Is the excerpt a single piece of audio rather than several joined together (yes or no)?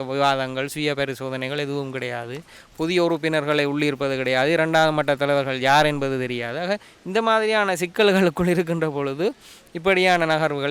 yes